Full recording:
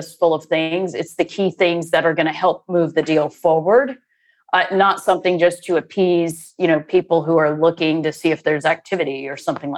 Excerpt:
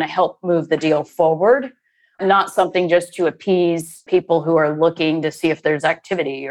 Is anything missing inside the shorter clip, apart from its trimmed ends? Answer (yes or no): yes